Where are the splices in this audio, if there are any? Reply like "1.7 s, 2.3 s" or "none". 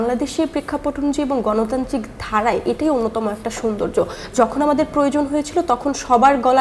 none